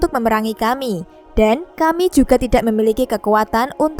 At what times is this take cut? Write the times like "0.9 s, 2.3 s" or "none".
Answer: none

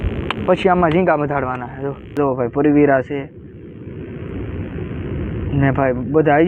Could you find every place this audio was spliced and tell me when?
2.2 s

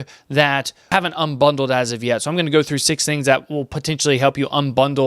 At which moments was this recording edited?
0.9 s

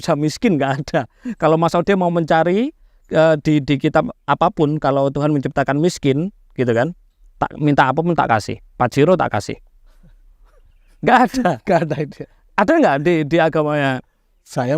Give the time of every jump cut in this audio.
none

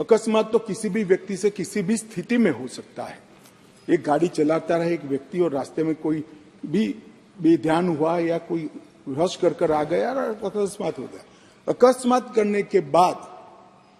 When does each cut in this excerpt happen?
none

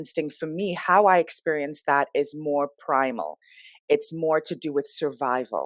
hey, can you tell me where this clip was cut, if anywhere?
none

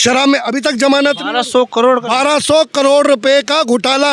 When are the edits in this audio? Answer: none

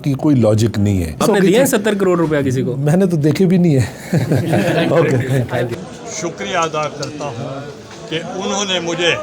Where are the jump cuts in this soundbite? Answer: 1.2 s, 5.9 s

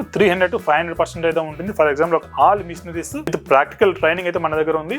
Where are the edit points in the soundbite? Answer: 2.3 s, 3.4 s

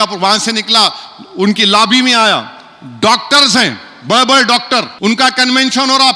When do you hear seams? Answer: 4.9 s

